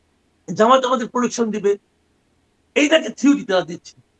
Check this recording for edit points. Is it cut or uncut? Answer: uncut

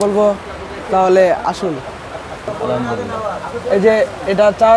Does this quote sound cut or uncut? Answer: cut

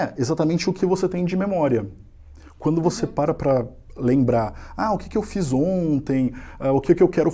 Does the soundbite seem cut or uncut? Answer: uncut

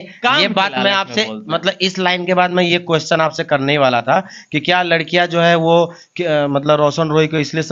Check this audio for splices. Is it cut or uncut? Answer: uncut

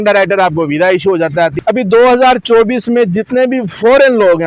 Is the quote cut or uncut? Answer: cut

